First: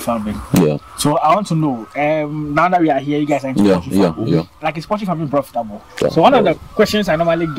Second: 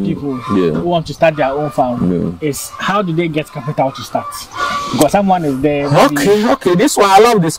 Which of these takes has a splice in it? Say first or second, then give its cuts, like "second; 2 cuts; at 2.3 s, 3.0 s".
first; 1 cut; at 6.0 s